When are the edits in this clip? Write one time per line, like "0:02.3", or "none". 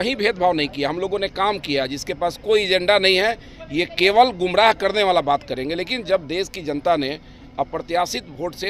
none